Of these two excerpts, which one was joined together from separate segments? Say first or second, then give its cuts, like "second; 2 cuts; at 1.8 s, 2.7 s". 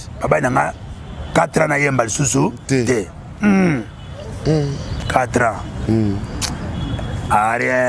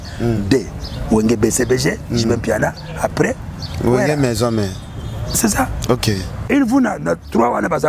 second; 1 cut; at 6.3 s